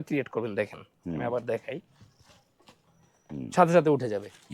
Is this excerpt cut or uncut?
uncut